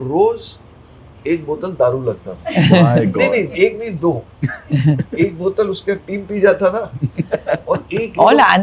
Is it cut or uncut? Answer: uncut